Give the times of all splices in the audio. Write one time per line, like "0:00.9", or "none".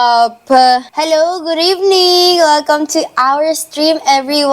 0:00.9